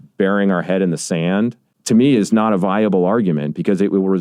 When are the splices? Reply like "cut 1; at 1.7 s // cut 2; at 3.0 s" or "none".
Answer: cut 1; at 1.7 s